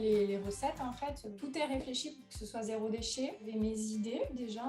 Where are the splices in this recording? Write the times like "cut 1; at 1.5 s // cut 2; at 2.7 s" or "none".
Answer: cut 1; at 1.3 s // cut 2; at 3.5 s